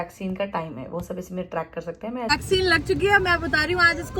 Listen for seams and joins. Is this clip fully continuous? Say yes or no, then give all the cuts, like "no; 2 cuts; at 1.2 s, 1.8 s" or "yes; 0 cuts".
no; 1 cut; at 2.3 s